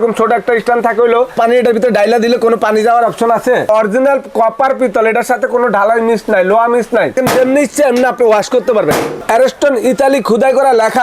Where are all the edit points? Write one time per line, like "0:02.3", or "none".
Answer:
0:01.3
0:03.7
0:07.2
0:09.1